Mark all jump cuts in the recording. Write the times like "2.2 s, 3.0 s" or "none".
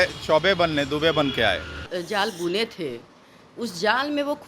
1.8 s